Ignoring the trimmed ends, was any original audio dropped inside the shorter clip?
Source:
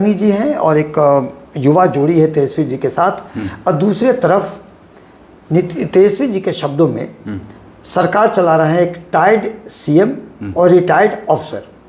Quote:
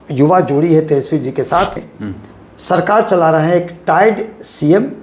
yes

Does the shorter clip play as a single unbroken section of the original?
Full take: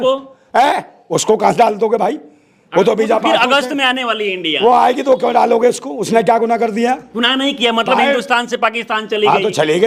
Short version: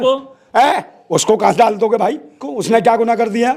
no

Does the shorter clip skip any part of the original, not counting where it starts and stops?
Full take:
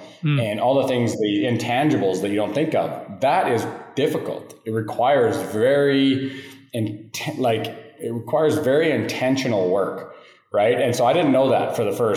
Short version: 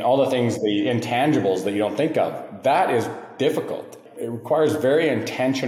yes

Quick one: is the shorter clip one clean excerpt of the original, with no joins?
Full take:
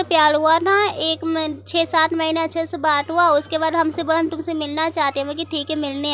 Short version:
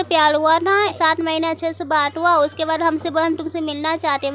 no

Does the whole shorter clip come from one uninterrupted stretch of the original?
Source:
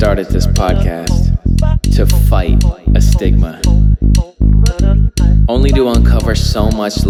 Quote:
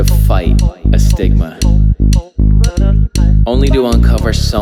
yes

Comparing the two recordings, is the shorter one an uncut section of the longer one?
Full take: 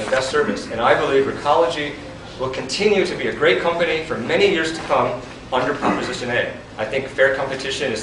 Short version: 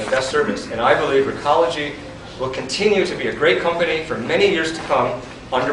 yes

